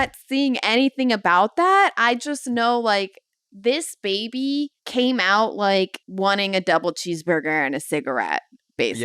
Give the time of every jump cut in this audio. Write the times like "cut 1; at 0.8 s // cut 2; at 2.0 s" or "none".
cut 1; at 4.8 s // cut 2; at 6.0 s